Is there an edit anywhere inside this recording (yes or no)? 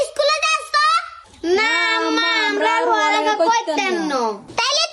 no